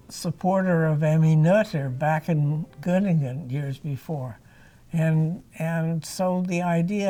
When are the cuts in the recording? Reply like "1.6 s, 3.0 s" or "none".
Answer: none